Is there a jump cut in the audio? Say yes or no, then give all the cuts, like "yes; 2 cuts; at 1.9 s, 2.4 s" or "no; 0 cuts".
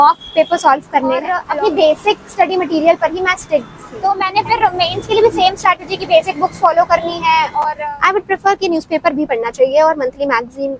yes; 3 cuts; at 1.4 s, 4.1 s, 7.7 s